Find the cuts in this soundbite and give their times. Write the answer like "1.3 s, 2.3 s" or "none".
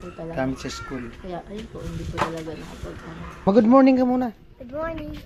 3.4 s